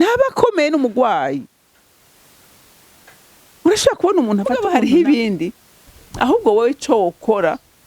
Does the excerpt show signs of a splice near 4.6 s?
yes; 1 cut; at 4.6 s

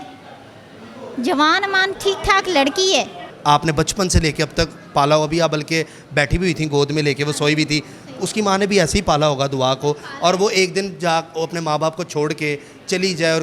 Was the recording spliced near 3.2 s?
yes; 1 cut; at 3.2 s

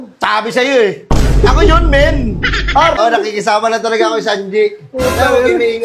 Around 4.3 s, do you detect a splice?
no; 1 cut; at 3.0 s

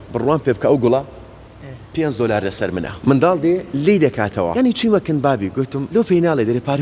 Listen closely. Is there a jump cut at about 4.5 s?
yes; 3 cuts; at 2.9 s, 4.5 s, 5.8 s

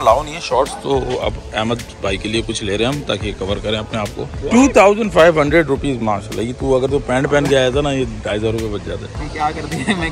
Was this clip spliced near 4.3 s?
yes; 2 cuts; at 4.3 s, 9.2 s

